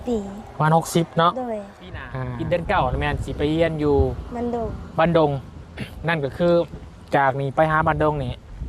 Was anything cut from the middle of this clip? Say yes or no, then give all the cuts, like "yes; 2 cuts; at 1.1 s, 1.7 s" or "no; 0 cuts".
yes; 1 cut; at 2.4 s